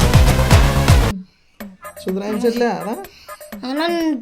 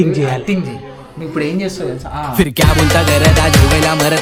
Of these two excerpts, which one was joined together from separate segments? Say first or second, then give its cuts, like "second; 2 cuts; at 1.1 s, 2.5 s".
first; 1 cut; at 1.1 s